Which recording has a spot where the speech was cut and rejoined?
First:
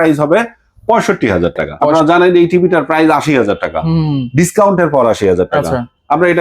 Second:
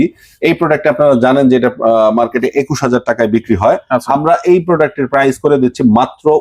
first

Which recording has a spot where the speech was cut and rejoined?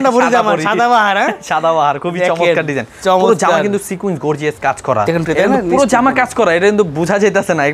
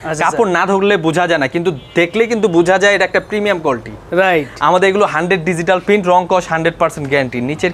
first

